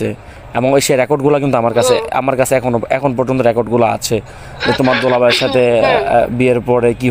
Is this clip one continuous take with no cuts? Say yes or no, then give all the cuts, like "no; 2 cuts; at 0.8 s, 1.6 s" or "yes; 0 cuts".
yes; 0 cuts